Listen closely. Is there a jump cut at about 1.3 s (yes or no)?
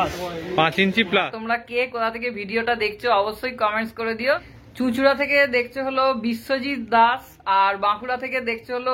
yes